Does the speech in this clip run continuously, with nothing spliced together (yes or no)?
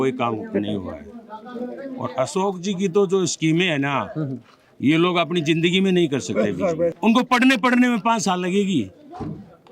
no